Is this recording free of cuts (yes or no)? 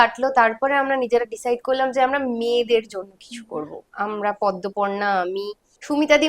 yes